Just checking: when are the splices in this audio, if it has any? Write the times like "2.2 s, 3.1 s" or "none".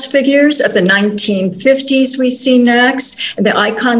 none

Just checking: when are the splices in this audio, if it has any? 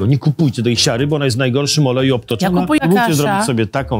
2.8 s

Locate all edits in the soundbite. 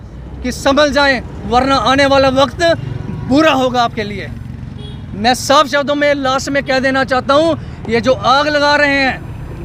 none

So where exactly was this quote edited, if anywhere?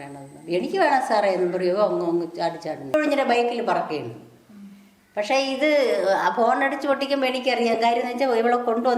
2.8 s

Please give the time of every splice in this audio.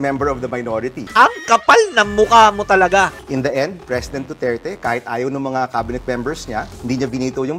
1.0 s, 3.2 s

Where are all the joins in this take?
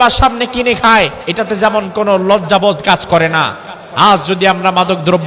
1.2 s

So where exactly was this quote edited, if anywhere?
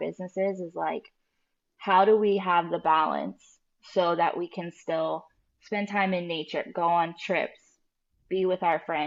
none

